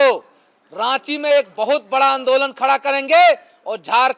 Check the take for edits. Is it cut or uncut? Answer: uncut